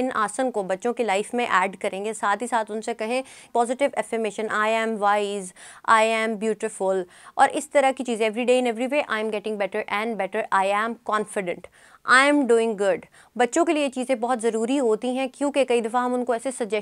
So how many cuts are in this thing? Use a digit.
1